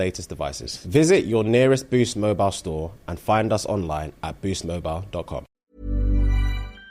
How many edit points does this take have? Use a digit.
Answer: 1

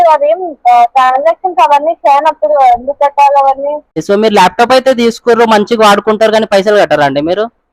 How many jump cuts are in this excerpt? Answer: 1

